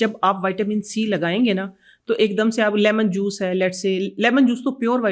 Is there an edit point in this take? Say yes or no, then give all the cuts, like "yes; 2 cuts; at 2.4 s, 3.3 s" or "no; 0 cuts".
no; 0 cuts